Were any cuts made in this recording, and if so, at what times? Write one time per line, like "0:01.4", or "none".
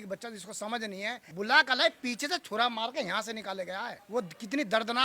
0:01.2
0:04.0